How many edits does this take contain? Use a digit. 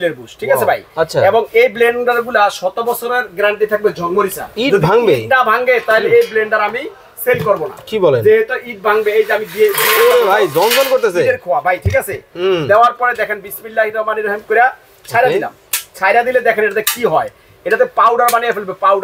1